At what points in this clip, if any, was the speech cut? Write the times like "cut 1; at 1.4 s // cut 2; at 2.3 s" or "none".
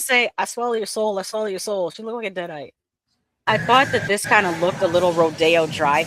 cut 1; at 3.5 s